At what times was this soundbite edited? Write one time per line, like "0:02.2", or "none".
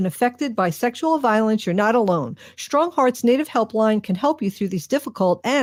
none